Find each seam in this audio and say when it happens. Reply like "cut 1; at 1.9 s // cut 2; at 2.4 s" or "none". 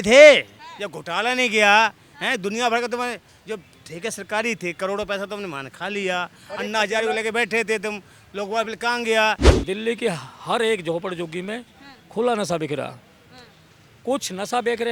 cut 1; at 9.5 s